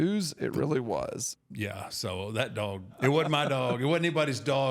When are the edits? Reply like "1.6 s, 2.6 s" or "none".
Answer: 1.3 s, 2.9 s